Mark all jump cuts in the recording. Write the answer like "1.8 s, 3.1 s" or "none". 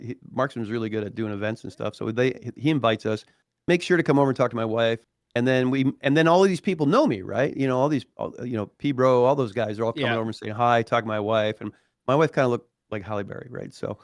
5.1 s